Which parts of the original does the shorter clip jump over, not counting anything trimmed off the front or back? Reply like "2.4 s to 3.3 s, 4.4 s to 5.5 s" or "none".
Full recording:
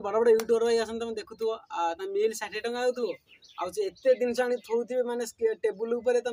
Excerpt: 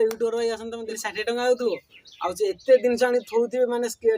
1.3 s to 2.4 s